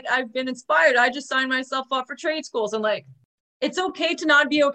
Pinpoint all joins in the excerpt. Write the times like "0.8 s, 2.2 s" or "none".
3.3 s